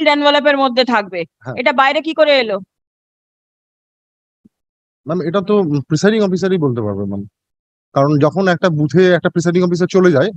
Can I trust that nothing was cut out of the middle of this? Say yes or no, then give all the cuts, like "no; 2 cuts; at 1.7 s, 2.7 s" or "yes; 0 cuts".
yes; 0 cuts